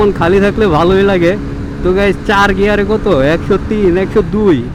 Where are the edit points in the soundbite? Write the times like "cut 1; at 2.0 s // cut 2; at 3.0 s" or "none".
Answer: none